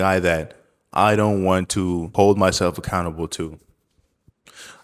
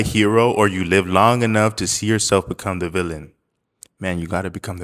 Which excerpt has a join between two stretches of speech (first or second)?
first